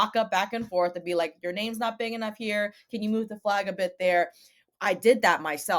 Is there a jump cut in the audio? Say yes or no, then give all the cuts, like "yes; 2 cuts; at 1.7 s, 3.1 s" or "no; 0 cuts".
no; 0 cuts